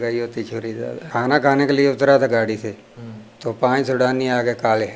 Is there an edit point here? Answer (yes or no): yes